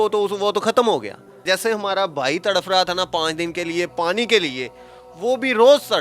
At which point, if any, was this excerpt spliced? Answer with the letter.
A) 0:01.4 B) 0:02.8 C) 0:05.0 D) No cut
A